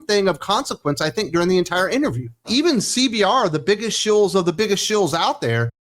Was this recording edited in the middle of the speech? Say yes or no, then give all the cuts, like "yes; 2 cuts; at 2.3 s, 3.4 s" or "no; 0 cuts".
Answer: yes; 1 cut; at 2.3 s